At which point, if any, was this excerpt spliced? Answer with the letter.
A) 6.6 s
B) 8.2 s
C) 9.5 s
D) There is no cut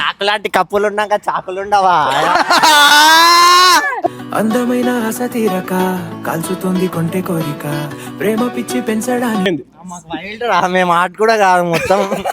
C